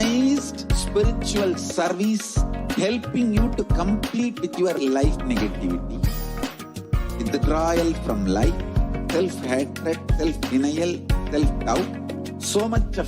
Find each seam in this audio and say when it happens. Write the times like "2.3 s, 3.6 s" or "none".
6.4 s